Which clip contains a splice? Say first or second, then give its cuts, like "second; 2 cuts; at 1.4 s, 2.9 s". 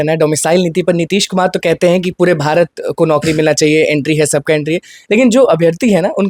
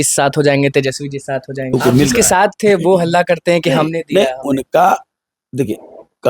second; 1 cut; at 1.7 s